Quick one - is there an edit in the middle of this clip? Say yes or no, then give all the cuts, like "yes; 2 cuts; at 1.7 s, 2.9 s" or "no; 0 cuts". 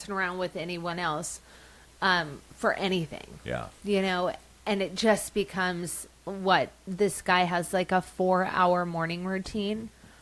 no; 0 cuts